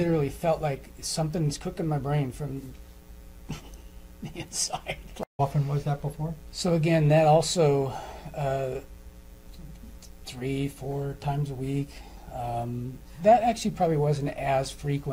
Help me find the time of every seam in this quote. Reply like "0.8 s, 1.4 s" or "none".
5.2 s